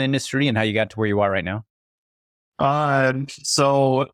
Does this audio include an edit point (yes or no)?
no